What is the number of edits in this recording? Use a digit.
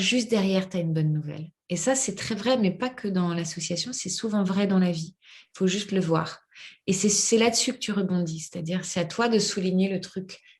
0